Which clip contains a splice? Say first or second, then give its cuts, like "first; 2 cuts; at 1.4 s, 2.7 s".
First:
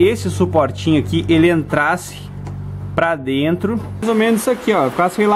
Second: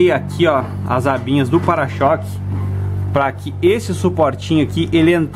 first; 1 cut; at 4.0 s